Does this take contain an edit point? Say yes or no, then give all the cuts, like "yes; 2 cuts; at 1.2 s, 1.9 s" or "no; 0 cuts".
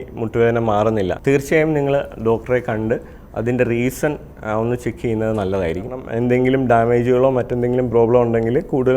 yes; 2 cuts; at 1.2 s, 6.1 s